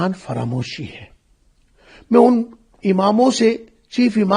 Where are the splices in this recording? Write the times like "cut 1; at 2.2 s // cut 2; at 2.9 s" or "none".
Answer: none